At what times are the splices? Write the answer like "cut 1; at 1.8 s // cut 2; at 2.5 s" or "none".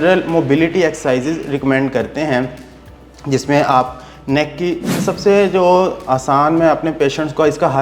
cut 1; at 5.0 s